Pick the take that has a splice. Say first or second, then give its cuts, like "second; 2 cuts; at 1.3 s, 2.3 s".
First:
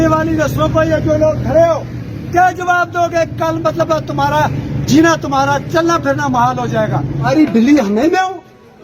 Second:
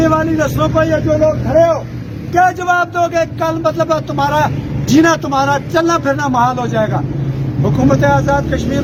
first; 1 cut; at 7.3 s